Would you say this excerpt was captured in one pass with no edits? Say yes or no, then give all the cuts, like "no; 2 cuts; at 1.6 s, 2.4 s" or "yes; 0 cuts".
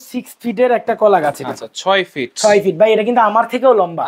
yes; 0 cuts